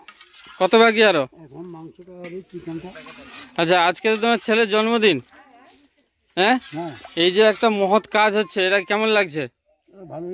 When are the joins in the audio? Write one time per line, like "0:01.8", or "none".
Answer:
none